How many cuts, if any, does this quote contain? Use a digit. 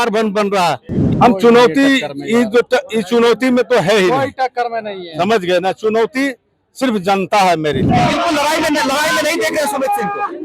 2